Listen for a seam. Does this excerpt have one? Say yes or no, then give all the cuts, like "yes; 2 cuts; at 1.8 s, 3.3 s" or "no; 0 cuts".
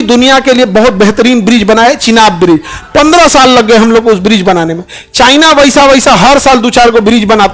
no; 0 cuts